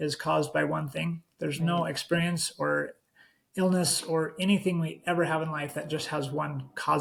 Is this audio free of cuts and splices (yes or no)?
yes